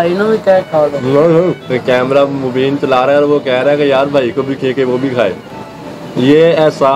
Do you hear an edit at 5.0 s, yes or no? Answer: no